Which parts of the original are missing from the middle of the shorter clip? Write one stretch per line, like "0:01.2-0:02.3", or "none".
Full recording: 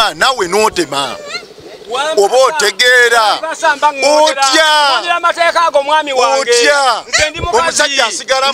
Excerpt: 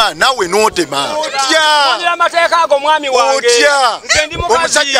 0:01.3-0:04.4